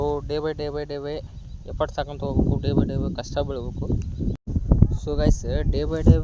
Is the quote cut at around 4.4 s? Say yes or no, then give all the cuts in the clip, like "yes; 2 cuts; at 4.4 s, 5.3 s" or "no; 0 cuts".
yes; 1 cut; at 4.4 s